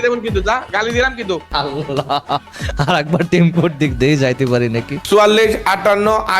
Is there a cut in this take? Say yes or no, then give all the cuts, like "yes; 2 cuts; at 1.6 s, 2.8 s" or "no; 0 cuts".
yes; 2 cuts; at 1.5 s, 4.9 s